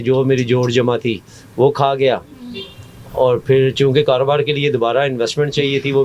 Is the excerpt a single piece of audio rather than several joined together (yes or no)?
yes